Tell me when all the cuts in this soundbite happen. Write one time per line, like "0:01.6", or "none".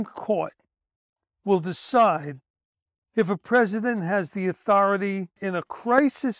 0:05.4